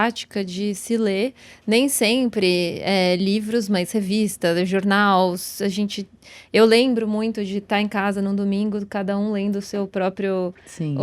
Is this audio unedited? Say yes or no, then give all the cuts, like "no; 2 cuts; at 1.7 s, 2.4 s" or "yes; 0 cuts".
yes; 0 cuts